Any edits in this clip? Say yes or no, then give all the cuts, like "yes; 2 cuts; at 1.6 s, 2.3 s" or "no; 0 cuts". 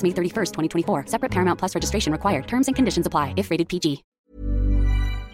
yes; 1 cut; at 4.2 s